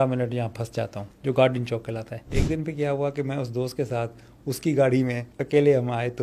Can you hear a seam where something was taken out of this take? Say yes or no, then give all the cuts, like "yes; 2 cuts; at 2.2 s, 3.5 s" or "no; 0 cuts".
yes; 3 cuts; at 1.1 s, 2.2 s, 5.3 s